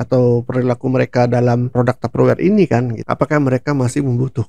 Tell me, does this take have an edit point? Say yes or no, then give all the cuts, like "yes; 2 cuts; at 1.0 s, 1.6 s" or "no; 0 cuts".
yes; 2 cuts; at 1.7 s, 3.0 s